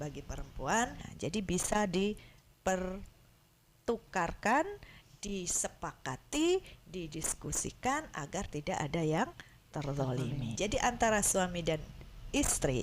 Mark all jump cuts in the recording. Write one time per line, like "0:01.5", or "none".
0:01.0
0:10.5